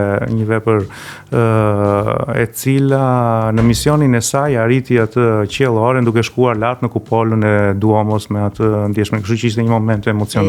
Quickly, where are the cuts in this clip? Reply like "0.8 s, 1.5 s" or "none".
none